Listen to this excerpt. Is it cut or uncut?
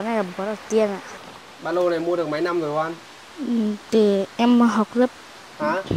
cut